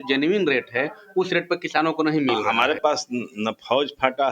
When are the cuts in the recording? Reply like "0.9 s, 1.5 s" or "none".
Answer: 2.5 s